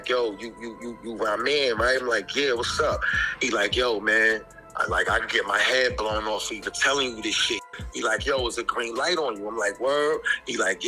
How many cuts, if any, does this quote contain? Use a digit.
1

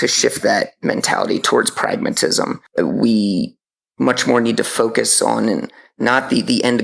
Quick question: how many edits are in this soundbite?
1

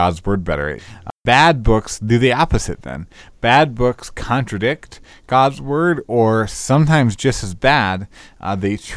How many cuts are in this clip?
1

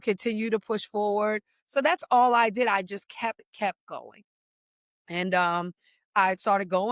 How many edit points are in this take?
0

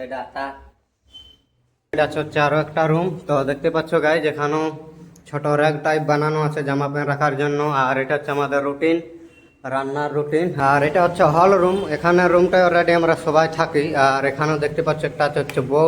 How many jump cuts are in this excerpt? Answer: 2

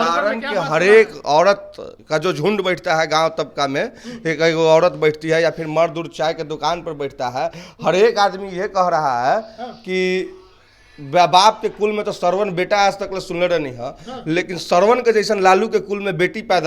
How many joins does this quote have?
0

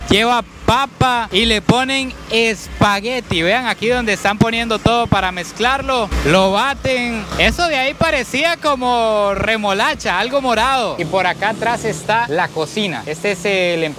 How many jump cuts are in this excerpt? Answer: 1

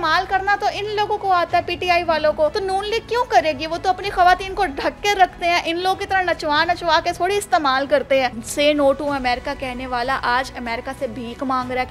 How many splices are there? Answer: 2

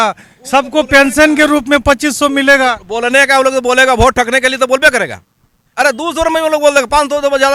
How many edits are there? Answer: 0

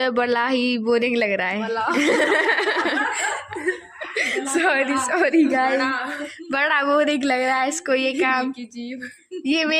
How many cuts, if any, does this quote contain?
0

